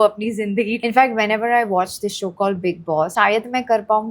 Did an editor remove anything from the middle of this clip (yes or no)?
yes